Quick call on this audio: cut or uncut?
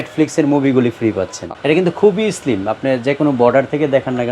cut